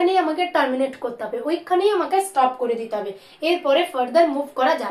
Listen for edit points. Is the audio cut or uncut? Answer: uncut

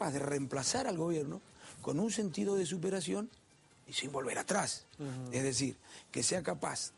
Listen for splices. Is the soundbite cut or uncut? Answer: uncut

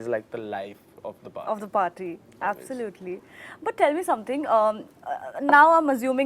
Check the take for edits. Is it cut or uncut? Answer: uncut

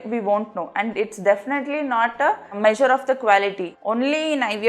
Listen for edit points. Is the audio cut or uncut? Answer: cut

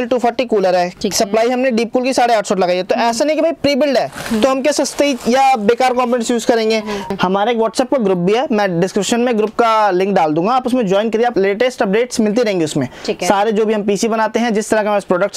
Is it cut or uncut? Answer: cut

